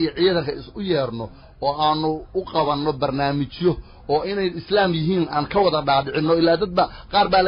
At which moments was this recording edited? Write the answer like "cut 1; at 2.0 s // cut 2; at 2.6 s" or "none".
none